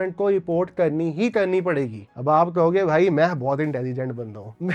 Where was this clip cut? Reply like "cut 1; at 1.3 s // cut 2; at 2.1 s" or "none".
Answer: none